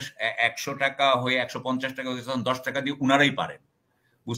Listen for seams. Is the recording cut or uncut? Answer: uncut